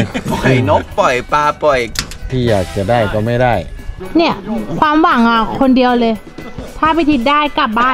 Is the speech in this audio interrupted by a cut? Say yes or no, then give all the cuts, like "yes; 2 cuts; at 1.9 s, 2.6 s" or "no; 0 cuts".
yes; 1 cut; at 2.3 s